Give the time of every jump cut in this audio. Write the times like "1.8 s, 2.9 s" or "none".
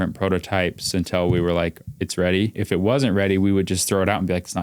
2.6 s